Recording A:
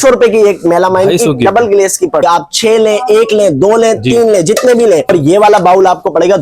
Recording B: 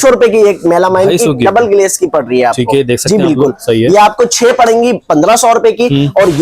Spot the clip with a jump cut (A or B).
A